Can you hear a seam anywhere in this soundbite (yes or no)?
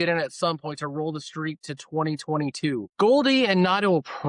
yes